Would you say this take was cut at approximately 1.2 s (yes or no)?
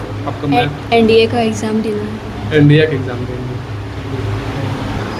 no